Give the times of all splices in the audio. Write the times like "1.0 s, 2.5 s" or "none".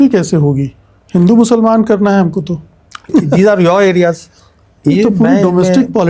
3.0 s